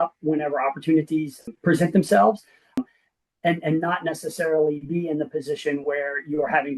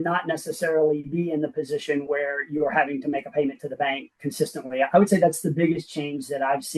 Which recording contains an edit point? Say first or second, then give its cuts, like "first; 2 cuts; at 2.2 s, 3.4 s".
first; 2 cuts; at 1.4 s, 2.8 s